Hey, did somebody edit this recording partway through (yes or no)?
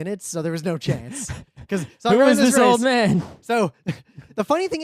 no